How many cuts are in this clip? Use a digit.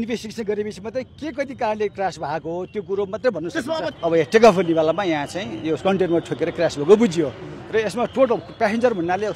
1